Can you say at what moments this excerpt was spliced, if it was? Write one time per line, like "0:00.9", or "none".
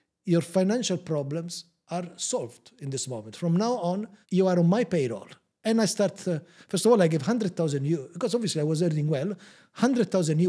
none